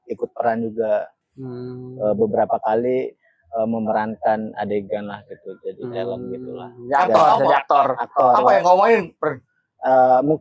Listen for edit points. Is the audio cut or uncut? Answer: uncut